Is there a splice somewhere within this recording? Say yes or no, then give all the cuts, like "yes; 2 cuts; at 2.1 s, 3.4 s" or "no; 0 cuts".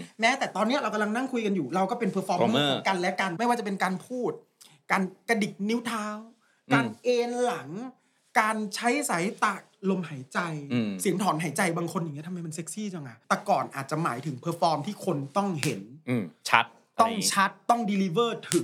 yes; 2 cuts; at 3.3 s, 13.1 s